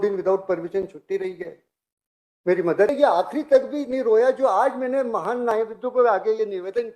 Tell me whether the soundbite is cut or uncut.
cut